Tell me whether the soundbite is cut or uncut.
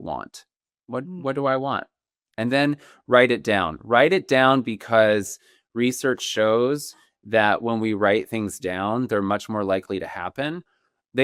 uncut